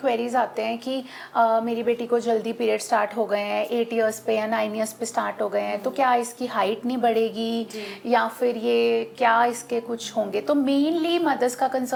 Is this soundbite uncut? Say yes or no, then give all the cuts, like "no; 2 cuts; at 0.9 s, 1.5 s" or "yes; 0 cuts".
yes; 0 cuts